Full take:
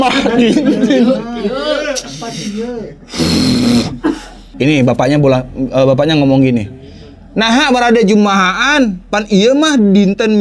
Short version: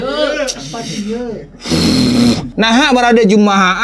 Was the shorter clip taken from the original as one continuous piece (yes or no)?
no